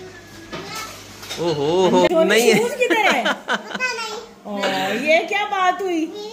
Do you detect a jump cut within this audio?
yes; 1 cut; at 2.1 s

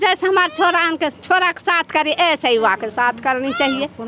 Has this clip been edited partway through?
no; 0 cuts

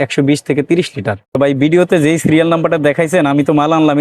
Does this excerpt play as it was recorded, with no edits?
no; 1 cut; at 1.4 s

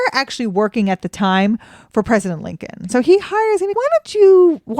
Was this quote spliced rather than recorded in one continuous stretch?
yes; 2 cuts; at 2.8 s, 3.7 s

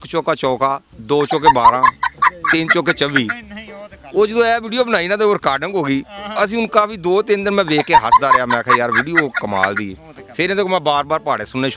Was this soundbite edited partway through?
no; 0 cuts

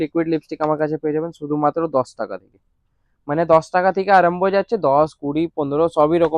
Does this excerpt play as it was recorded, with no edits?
yes; 0 cuts

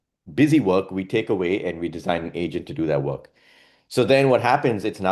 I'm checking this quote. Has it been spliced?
no; 0 cuts

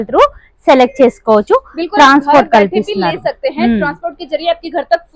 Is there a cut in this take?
no; 0 cuts

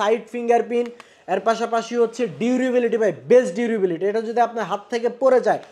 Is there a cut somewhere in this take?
no; 0 cuts

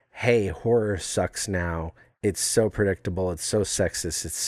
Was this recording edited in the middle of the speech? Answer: no; 0 cuts

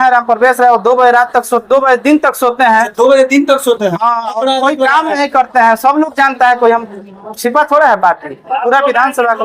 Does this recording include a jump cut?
no; 0 cuts

